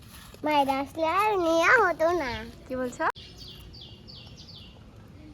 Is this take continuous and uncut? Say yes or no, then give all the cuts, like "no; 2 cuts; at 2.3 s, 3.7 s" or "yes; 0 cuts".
no; 1 cut; at 3.3 s